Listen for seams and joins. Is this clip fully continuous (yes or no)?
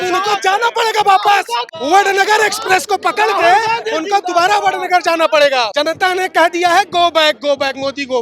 no